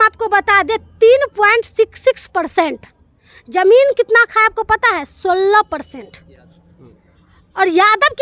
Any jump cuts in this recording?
no; 0 cuts

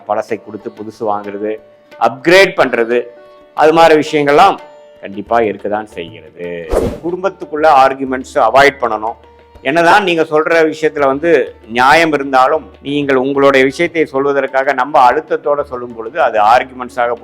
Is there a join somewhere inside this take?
yes; 2 cuts; at 6.9 s, 12.7 s

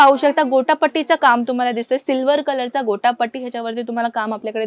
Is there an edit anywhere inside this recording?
no; 0 cuts

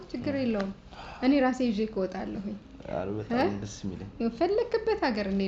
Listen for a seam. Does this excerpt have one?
no; 0 cuts

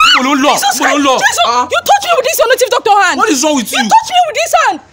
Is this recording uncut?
yes; 0 cuts

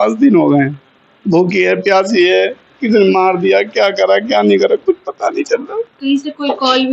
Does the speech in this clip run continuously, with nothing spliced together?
yes; 0 cuts

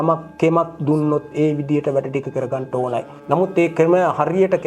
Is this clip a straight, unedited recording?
no; 1 cut; at 3.1 s

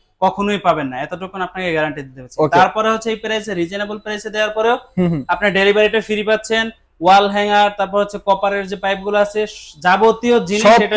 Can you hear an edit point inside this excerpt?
no; 0 cuts

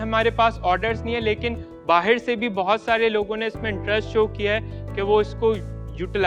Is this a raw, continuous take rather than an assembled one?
yes; 0 cuts

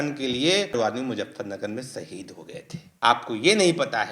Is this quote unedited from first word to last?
no; 1 cut; at 2.8 s

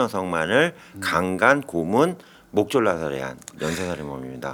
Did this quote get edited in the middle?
no; 0 cuts

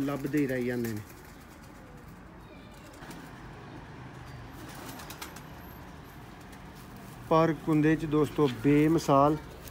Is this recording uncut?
no; 1 cut; at 3.0 s

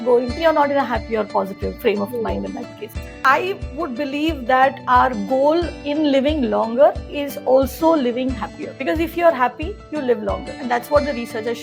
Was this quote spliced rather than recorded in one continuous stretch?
no; 0 cuts

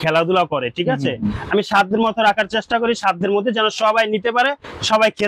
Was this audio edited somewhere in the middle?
no; 0 cuts

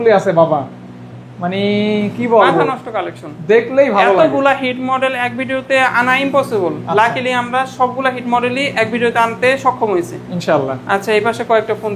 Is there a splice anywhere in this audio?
no; 0 cuts

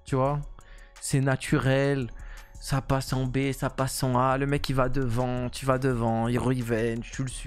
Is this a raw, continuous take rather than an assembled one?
yes; 0 cuts

